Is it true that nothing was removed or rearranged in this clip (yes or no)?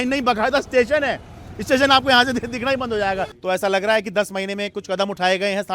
no